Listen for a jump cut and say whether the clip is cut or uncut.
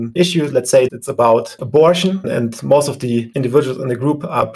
uncut